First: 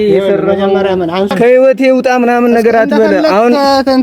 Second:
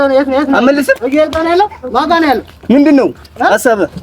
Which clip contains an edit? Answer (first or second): first